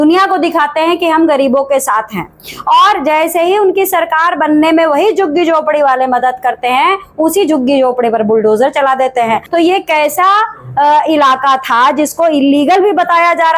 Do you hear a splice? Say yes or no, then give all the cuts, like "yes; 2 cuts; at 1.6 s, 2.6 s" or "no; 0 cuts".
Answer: yes; 1 cut; at 9.4 s